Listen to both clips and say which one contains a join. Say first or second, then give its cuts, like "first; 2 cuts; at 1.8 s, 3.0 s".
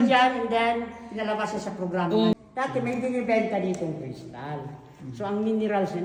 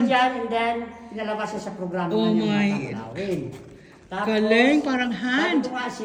first; 1 cut; at 2.3 s